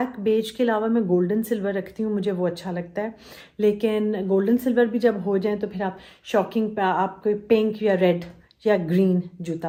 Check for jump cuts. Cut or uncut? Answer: uncut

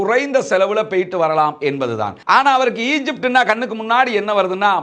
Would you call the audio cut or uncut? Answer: uncut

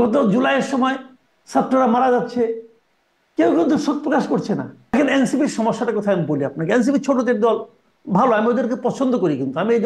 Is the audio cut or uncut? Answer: cut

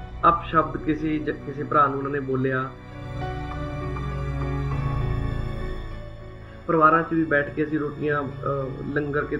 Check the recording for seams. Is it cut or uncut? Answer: cut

